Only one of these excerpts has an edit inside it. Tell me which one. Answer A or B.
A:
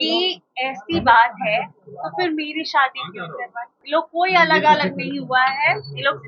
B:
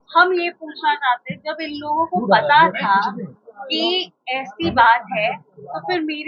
A